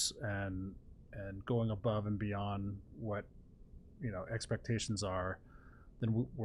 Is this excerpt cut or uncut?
uncut